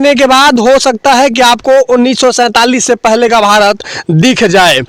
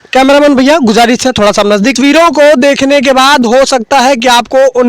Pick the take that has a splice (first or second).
second